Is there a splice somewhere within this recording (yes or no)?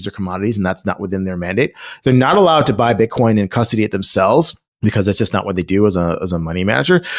no